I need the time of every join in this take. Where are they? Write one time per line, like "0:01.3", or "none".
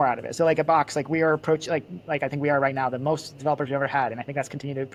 none